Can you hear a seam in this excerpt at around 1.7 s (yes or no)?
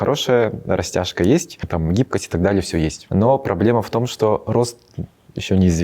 yes